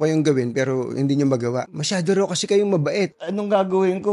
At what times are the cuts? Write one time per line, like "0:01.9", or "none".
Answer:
0:01.7
0:03.2